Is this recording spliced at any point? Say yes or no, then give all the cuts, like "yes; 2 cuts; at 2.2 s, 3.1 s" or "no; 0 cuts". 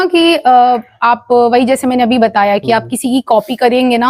no; 0 cuts